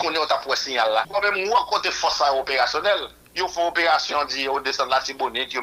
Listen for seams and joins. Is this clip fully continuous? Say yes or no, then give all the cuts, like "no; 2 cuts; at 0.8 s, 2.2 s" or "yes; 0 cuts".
no; 1 cut; at 1.1 s